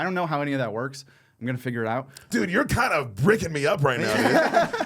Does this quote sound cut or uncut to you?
cut